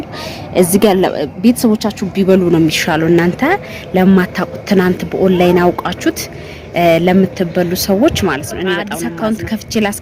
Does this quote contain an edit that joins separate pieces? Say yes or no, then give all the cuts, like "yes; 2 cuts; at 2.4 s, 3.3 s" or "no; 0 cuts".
yes; 1 cut; at 8.9 s